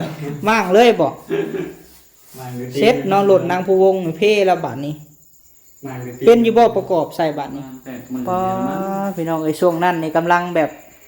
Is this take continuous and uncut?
no; 1 cut; at 7.7 s

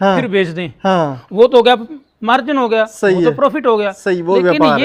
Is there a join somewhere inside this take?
no; 0 cuts

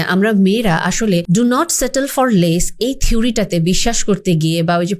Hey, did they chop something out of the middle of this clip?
yes; 1 cut; at 1.2 s

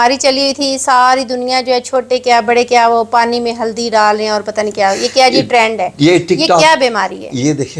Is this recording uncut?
yes; 0 cuts

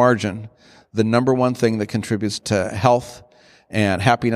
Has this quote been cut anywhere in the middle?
yes; 1 cut; at 2.4 s

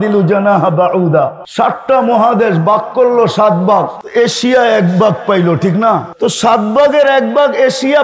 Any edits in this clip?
yes; 3 cuts; at 1.4 s, 4.0 s, 6.1 s

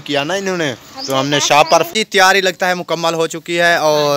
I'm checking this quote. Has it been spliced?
yes; 1 cut; at 1.9 s

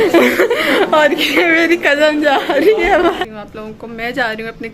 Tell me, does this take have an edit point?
yes; 2 cuts; at 1.1 s, 3.3 s

